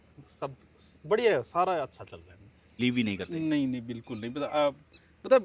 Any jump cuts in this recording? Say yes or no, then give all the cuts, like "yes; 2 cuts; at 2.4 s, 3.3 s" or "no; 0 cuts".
yes; 1 cut; at 2.7 s